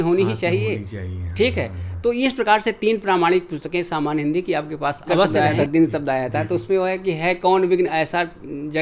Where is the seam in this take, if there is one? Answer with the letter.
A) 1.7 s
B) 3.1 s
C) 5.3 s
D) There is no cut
C